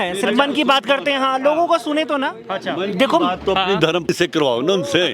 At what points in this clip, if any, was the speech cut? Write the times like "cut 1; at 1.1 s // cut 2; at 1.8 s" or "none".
cut 1; at 4.1 s